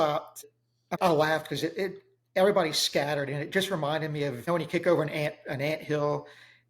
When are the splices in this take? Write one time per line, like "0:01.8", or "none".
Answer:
0:00.9
0:04.4